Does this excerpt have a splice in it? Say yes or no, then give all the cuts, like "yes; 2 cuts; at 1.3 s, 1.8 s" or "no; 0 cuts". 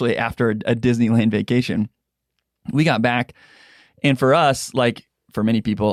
no; 0 cuts